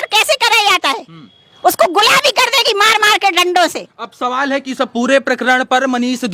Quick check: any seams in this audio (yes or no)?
no